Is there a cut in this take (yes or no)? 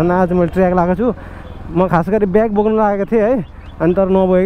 no